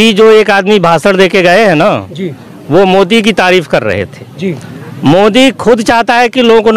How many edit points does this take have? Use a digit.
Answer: 0